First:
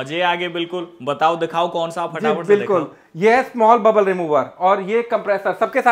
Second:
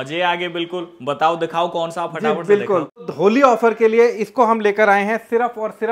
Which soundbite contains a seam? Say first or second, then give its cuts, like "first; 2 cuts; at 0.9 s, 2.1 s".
second; 1 cut; at 3.0 s